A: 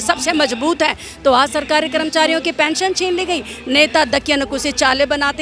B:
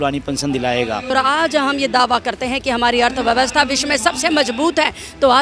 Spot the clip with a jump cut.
B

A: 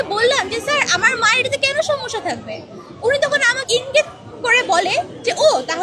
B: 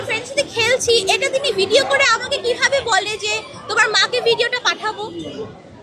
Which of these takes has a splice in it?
A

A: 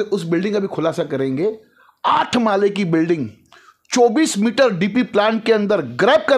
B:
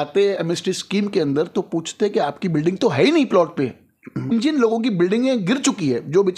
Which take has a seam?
B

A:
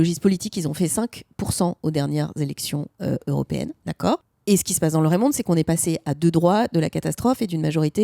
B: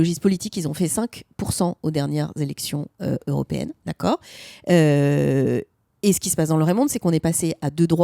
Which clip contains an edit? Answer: A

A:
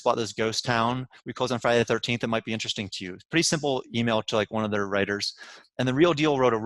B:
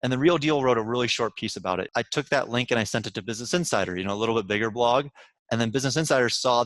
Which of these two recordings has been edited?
B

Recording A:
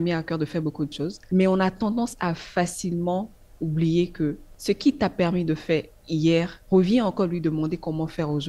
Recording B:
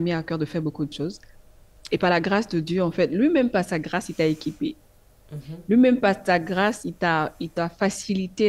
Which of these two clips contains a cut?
A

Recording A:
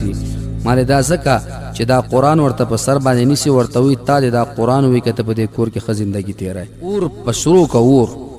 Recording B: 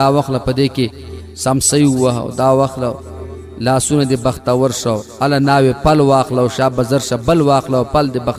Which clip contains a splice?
A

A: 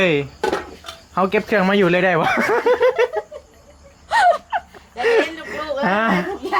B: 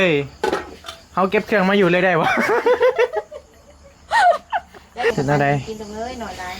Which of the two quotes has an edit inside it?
B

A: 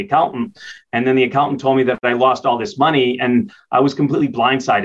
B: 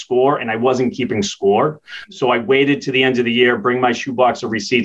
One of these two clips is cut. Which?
A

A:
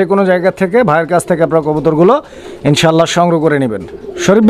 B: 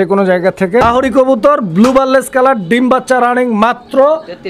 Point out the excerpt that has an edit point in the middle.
B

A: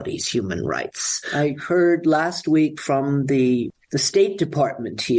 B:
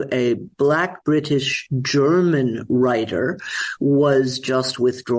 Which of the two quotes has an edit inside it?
A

